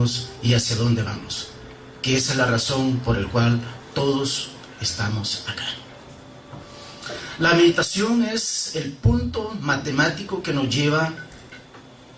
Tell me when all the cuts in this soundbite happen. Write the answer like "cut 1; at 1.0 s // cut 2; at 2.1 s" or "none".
cut 1; at 7.8 s